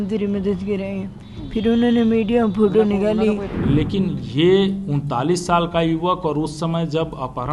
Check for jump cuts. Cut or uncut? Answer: cut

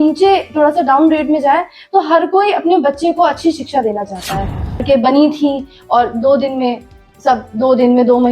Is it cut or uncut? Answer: cut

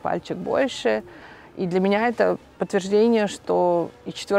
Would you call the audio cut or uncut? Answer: uncut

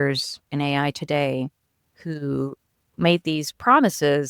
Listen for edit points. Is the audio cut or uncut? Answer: uncut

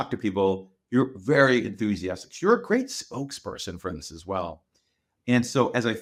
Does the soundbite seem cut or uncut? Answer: uncut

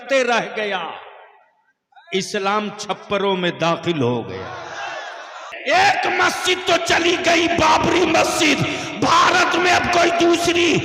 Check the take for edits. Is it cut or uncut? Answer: cut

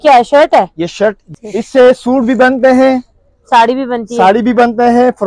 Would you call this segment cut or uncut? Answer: cut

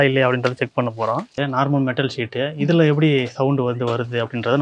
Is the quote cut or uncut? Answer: cut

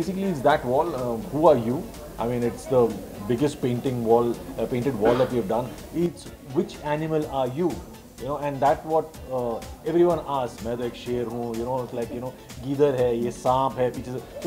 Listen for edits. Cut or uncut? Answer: uncut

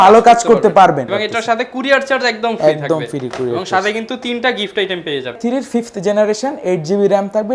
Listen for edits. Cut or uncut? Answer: cut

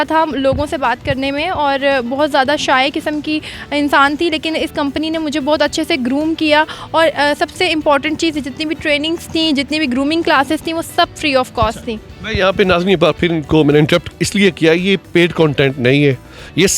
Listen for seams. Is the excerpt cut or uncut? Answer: uncut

